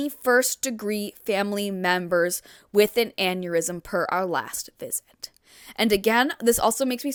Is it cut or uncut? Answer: uncut